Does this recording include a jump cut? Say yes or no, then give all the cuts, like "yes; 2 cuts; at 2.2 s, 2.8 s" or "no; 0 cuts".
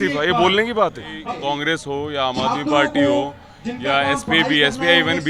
yes; 1 cut; at 1.3 s